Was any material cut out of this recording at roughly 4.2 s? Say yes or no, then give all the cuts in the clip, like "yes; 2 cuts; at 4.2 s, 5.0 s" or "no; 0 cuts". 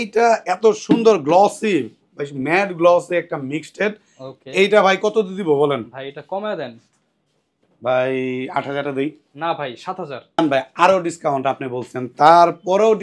no; 0 cuts